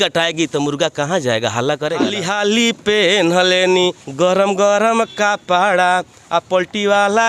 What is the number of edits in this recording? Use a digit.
1